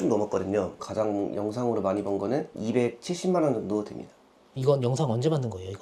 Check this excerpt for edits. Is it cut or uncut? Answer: uncut